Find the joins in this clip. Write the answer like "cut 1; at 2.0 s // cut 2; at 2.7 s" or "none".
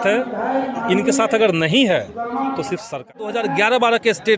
cut 1; at 3.1 s